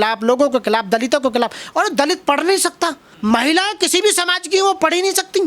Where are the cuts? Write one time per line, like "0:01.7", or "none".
0:03.1

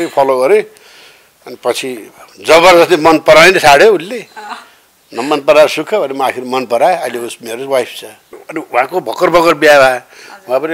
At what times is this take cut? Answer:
0:08.4

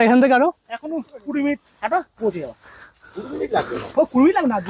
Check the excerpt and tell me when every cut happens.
none

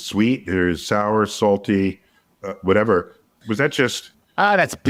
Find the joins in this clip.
none

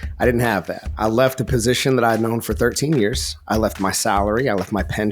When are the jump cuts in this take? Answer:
0:01.0

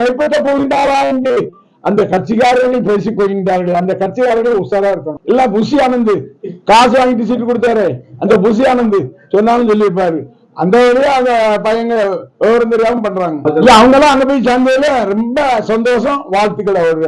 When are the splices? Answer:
0:05.1
0:13.4

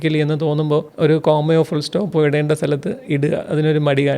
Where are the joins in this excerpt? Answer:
0:00.9

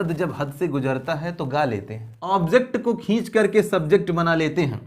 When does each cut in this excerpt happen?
0:02.3

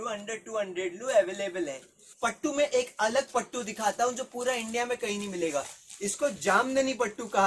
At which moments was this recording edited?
0:02.1

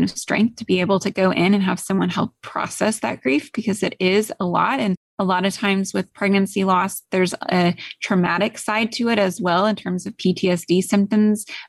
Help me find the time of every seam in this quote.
none

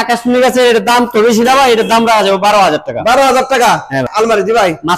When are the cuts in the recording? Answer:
0:04.1

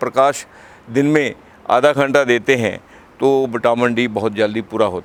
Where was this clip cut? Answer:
none

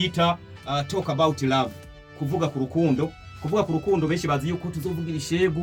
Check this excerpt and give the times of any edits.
none

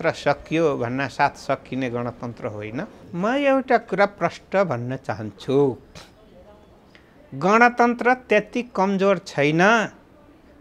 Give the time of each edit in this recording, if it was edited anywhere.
0:03.0

